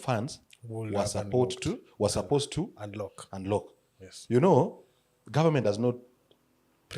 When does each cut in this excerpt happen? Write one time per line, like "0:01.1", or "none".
none